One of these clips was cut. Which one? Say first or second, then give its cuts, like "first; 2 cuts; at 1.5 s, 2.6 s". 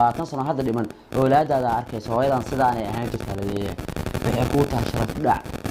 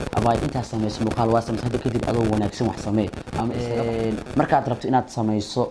second; 1 cut; at 3.6 s